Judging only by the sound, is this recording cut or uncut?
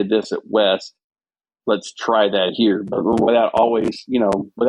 uncut